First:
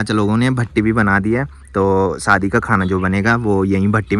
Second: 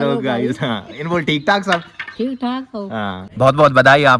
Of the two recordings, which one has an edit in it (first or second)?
second